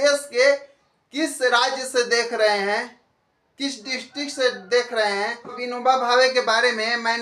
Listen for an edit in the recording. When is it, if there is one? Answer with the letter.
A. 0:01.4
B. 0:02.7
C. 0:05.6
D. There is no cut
C